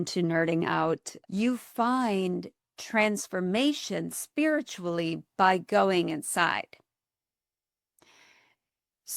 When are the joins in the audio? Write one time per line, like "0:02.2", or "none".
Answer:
0:01.1